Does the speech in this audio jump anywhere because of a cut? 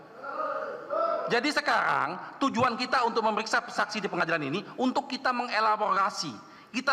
no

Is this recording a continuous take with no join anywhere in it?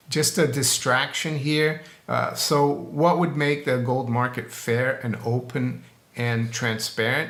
yes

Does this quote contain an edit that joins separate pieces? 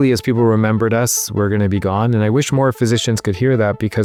no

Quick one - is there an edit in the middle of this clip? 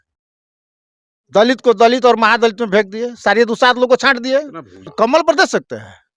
yes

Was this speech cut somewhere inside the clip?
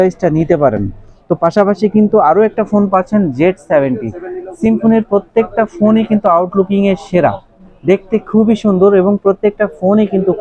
no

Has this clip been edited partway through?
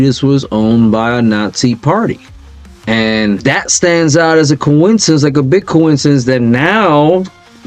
yes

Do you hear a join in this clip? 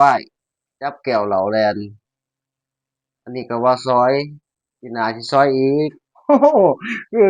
no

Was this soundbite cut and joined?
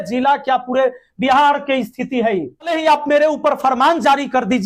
yes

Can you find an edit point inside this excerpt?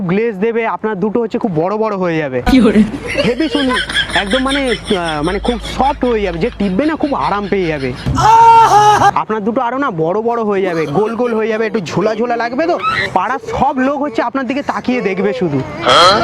yes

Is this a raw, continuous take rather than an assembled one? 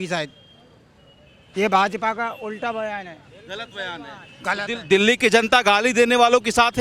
yes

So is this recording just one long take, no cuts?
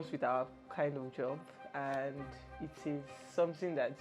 yes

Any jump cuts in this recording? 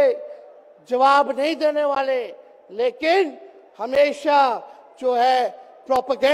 no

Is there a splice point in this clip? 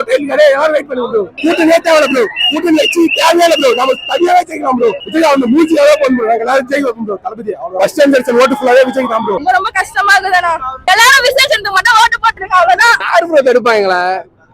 yes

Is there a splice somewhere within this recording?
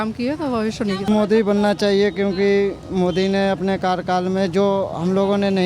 yes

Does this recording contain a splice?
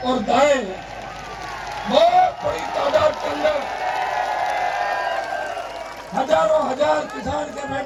no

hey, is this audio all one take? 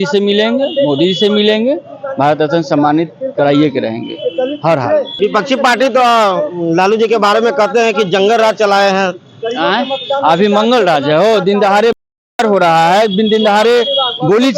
no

